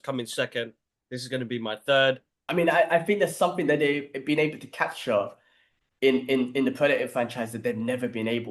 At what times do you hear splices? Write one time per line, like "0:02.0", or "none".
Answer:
0:02.4